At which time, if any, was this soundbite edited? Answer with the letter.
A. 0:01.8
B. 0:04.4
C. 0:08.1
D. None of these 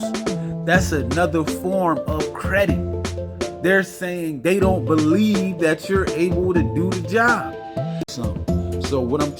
C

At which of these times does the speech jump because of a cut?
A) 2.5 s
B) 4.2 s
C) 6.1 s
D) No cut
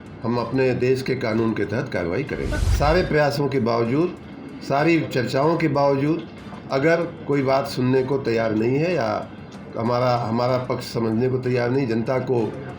A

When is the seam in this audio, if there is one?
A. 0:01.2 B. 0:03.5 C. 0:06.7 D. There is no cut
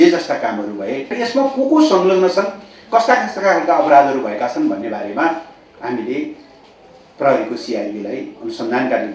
A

